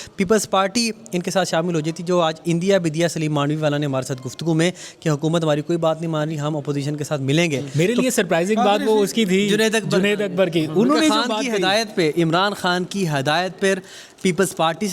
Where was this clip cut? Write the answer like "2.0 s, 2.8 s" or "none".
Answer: 7.6 s